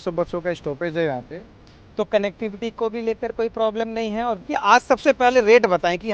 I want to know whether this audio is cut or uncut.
cut